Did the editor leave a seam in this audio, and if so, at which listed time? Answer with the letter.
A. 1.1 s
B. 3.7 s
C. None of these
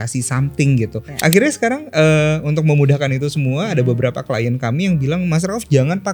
A